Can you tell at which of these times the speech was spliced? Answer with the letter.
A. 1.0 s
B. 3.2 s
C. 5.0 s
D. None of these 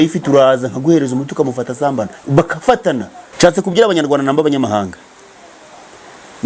B